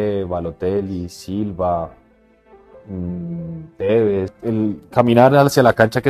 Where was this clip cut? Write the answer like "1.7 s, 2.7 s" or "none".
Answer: 4.3 s

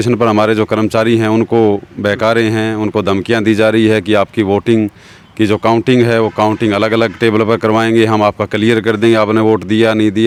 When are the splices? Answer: none

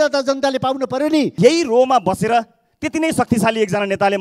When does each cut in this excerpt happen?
1.3 s

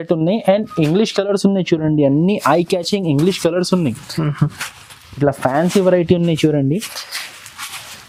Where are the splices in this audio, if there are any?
none

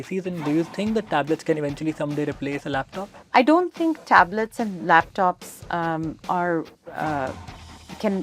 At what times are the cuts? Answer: 3.1 s

